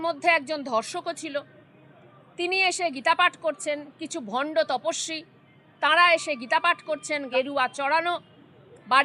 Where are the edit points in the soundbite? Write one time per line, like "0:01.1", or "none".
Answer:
0:07.3